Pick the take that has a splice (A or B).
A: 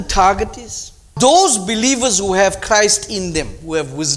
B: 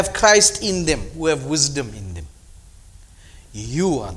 A